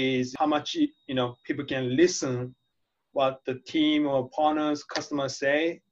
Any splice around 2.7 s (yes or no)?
no